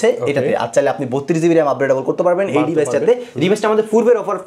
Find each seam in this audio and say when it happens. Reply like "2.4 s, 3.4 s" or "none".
none